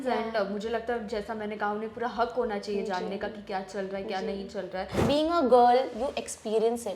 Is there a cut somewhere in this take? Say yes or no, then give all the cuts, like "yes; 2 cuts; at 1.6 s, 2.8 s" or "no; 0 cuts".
yes; 1 cut; at 5.0 s